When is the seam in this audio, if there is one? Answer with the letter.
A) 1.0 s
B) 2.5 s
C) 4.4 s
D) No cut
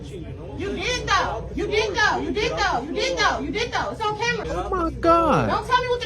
C